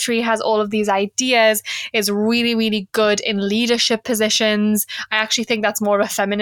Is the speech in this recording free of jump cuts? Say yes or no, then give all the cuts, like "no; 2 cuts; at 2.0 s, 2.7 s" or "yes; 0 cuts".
yes; 0 cuts